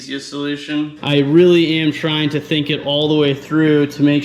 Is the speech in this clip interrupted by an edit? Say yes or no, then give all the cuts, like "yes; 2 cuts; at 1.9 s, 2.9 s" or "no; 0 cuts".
yes; 1 cut; at 1.0 s